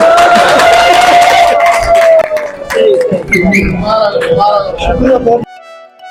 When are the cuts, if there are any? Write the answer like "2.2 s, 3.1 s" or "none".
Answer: none